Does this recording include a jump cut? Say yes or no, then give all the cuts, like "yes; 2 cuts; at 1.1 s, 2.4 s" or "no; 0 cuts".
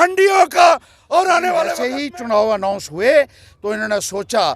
yes; 1 cut; at 1.8 s